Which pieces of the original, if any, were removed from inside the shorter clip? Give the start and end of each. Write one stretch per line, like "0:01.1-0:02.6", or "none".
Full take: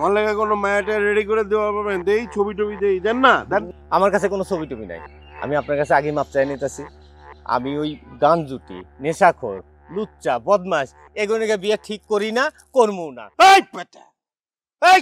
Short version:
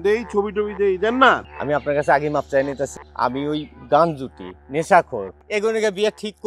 0:03.4-0:05.2
0:06.8-0:07.3
0:09.7-0:11.0